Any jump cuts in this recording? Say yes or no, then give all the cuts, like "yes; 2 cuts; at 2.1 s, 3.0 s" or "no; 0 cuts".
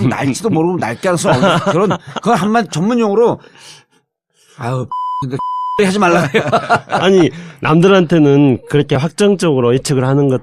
yes; 1 cut; at 2.4 s